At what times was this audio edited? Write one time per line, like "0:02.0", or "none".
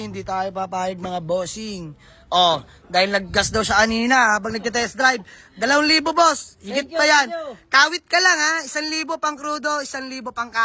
none